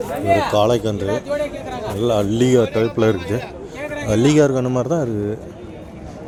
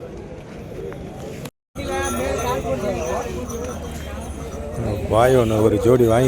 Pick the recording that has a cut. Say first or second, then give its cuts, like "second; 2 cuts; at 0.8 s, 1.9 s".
second; 1 cut; at 1.5 s